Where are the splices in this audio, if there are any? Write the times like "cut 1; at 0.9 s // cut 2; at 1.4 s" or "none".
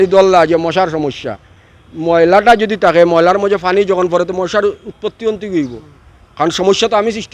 none